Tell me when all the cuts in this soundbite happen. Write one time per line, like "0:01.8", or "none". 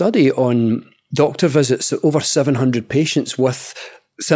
0:01.0